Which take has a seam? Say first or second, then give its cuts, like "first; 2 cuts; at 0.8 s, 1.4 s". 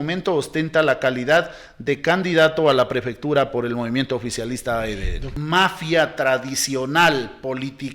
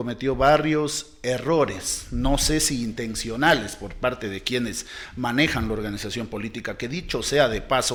first; 1 cut; at 5.2 s